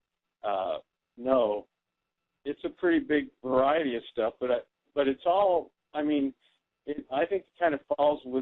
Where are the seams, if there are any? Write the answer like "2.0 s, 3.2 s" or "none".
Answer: 5.2 s